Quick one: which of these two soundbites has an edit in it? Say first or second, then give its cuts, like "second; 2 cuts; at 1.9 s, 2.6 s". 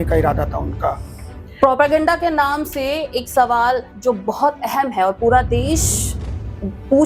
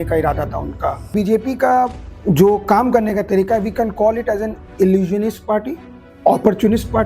second; 1 cut; at 1.0 s